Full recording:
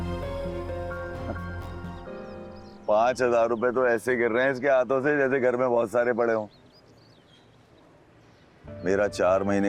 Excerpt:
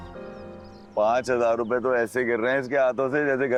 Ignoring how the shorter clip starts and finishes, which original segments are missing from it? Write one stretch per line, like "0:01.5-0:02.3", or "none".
none